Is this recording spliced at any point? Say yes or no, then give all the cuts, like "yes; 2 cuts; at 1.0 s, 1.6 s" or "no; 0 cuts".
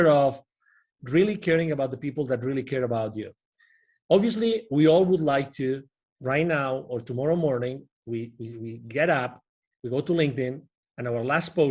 no; 0 cuts